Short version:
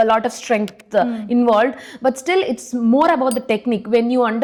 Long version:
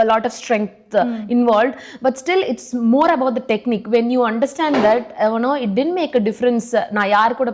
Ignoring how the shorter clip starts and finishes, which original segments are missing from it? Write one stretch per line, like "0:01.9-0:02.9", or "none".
none